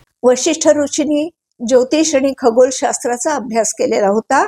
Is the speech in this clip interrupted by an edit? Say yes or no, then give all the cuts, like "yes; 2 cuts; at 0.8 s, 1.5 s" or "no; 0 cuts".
no; 0 cuts